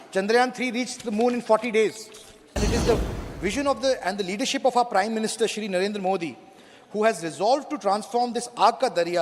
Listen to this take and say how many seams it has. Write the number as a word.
one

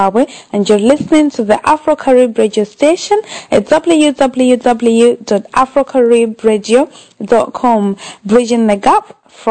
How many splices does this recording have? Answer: one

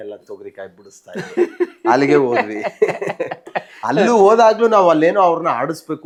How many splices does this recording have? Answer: zero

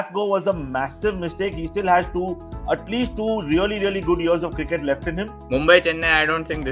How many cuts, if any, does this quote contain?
one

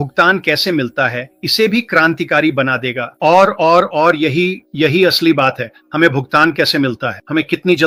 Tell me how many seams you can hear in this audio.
zero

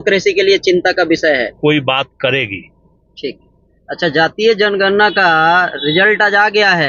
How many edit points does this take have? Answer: one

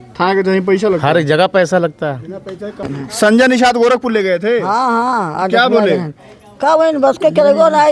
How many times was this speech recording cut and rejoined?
one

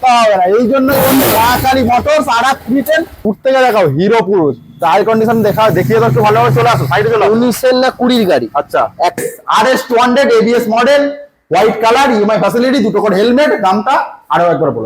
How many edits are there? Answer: two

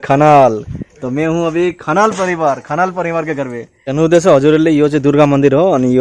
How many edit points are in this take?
one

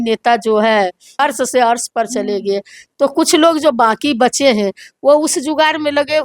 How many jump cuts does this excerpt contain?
one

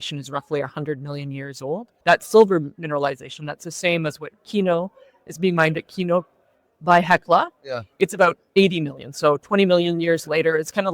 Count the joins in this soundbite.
two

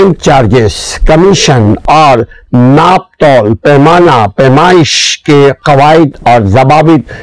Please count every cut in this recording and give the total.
one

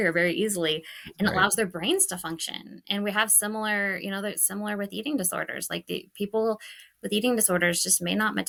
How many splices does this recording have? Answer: zero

